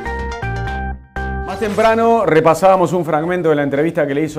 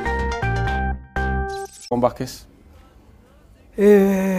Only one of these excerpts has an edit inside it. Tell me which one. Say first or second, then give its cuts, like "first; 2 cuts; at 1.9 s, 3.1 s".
first; 1 cut; at 1.4 s